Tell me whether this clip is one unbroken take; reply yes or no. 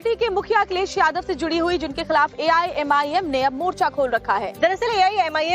no